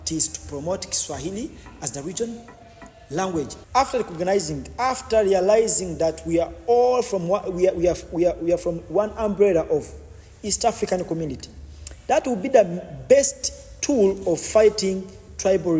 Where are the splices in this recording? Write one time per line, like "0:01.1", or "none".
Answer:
0:03.6